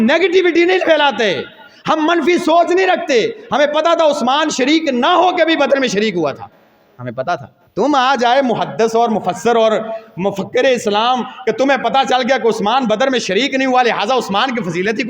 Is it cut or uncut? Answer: cut